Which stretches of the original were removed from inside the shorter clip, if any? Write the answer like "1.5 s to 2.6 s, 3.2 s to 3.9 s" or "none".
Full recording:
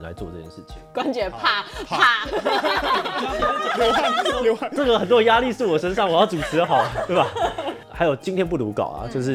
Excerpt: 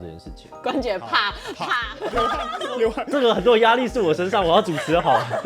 2.4 s to 3.8 s